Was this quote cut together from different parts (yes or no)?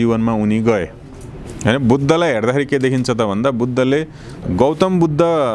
yes